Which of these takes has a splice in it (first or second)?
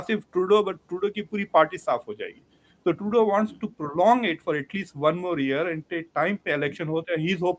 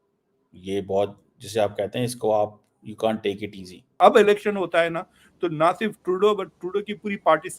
second